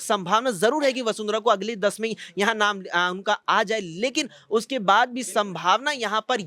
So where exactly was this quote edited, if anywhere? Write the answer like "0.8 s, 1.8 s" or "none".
none